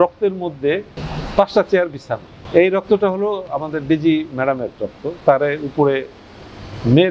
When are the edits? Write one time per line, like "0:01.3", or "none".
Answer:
none